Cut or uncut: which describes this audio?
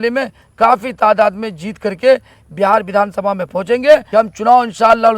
cut